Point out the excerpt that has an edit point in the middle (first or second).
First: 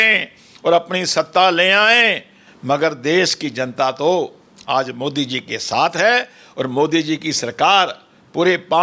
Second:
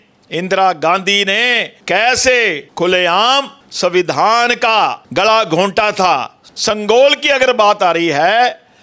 second